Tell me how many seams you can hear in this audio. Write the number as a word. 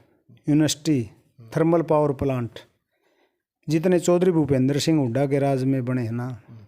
zero